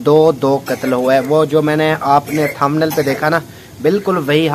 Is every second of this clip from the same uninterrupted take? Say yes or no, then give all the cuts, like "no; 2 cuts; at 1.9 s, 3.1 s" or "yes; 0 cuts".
yes; 0 cuts